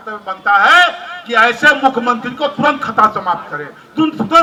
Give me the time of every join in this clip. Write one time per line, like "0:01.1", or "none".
none